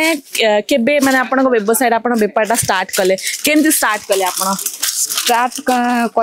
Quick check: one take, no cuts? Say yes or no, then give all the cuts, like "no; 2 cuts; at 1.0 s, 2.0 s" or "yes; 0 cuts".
yes; 0 cuts